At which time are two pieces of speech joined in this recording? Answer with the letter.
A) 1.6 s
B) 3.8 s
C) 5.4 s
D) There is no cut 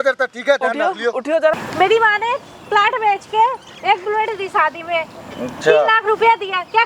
A